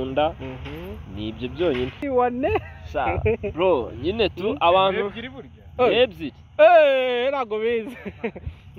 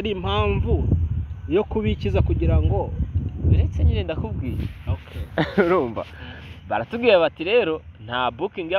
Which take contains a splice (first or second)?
first